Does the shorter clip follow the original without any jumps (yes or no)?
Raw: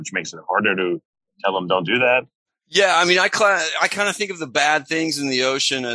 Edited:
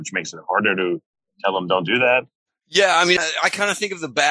no